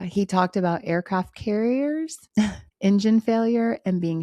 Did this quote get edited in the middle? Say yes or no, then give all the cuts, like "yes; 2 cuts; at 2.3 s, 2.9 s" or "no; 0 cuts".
yes; 1 cut; at 2.5 s